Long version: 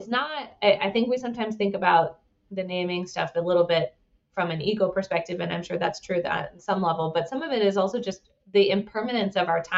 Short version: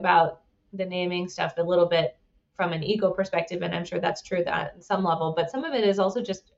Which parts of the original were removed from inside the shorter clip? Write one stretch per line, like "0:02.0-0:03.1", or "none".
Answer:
none